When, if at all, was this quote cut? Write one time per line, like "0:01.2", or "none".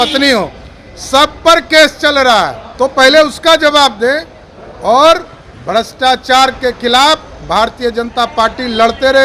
0:02.6